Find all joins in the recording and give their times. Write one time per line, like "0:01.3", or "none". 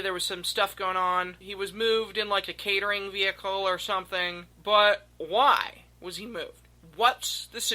0:01.4
0:04.5